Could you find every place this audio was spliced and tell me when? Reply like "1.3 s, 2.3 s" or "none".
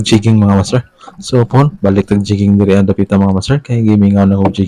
none